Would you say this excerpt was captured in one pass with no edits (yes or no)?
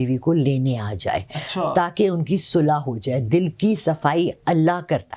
yes